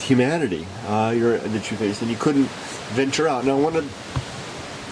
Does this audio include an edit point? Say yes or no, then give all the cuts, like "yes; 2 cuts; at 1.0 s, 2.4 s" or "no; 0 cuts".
no; 0 cuts